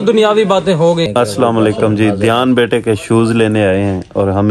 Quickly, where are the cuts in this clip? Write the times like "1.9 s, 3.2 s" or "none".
1.1 s